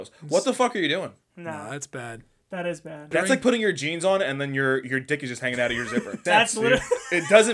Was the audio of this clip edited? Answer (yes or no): yes